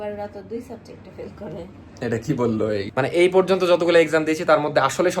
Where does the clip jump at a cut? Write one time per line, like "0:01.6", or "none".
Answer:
0:02.9